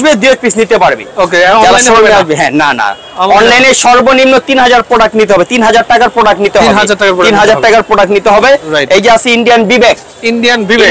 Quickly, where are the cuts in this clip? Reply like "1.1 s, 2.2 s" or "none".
none